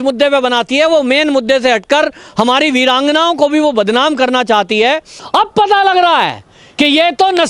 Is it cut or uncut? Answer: cut